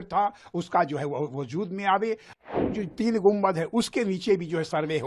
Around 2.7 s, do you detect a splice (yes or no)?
yes